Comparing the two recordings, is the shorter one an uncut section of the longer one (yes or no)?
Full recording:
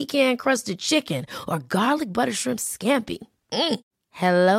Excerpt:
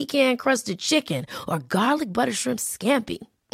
yes